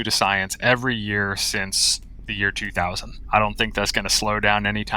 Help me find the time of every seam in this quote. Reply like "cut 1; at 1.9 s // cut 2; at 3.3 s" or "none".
cut 1; at 3.1 s